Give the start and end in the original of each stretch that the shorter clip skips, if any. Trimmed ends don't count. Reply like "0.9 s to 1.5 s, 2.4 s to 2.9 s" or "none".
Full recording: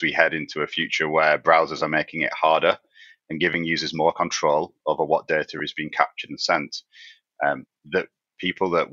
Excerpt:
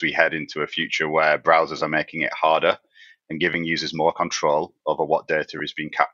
none